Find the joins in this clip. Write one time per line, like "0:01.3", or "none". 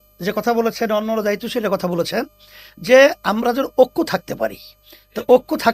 none